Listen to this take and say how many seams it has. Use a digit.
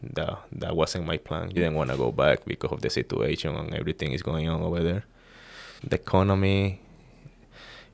1